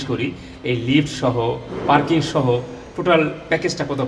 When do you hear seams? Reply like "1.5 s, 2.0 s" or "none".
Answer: none